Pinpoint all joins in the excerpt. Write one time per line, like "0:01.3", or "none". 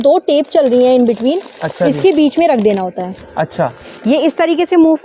none